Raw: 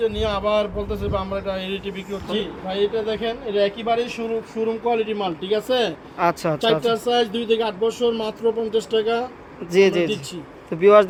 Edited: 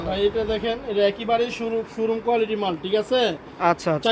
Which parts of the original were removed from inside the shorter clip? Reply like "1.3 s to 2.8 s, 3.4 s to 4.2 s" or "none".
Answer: none